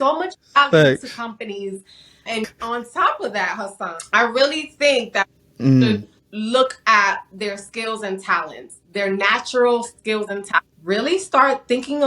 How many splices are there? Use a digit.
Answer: 2